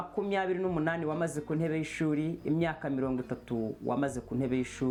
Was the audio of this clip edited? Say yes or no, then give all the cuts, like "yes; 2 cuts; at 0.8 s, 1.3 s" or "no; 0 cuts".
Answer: no; 0 cuts